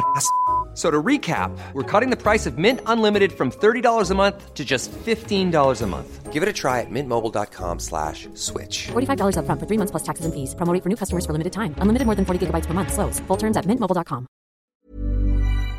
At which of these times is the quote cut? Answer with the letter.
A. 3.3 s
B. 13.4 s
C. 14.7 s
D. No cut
C